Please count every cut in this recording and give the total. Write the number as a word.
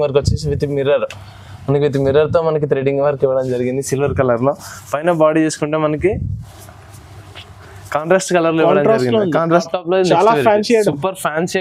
one